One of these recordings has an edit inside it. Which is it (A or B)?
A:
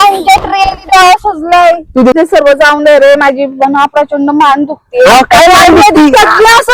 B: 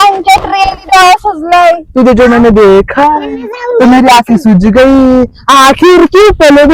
A